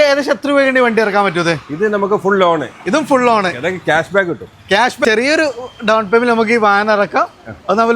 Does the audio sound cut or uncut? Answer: cut